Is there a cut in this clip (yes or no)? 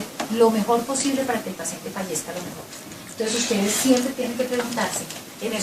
yes